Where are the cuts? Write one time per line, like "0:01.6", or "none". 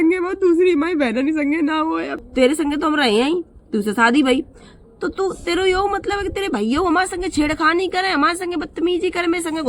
0:02.1